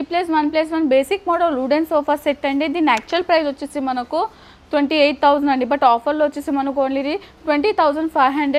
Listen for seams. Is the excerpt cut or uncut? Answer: uncut